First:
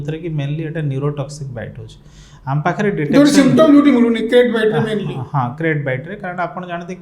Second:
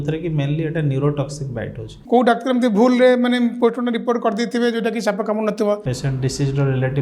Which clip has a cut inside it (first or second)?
second